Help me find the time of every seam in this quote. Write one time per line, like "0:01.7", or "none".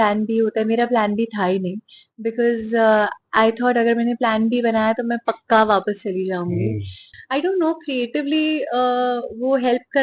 0:07.1

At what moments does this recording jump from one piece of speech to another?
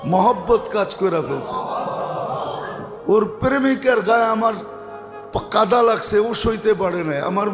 none

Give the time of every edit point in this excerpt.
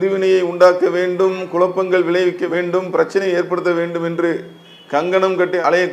none

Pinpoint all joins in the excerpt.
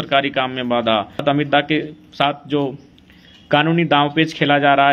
0:01.2

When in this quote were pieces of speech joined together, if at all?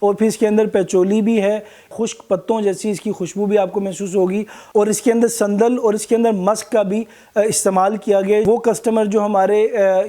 0:01.9
0:08.4

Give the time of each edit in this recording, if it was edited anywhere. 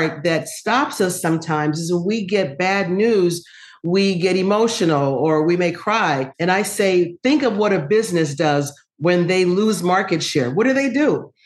none

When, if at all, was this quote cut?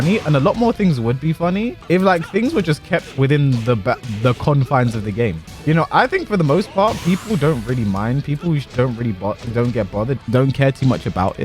0:01.8
0:05.5
0:10.2

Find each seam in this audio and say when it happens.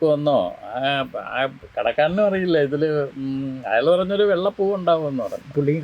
none

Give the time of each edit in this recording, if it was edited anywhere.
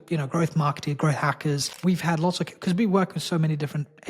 0:01.7

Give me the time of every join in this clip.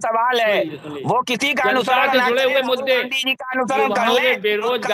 none

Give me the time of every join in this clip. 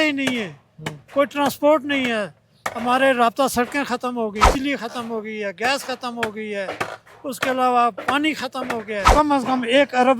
0:04.5
0:09.1

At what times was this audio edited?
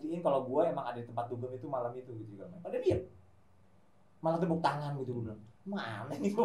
none

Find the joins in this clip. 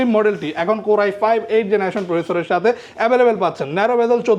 none

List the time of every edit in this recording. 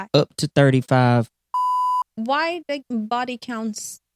0:02.0

